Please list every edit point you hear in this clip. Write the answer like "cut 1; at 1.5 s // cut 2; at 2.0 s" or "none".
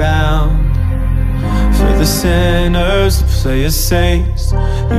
none